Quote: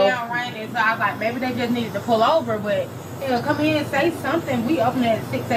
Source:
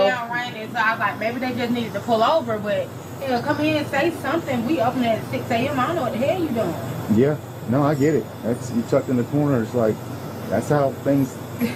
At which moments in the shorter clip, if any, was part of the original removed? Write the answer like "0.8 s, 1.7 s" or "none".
none